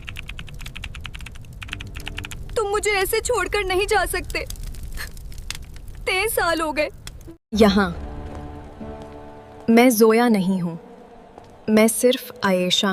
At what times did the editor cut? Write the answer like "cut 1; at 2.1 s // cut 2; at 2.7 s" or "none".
none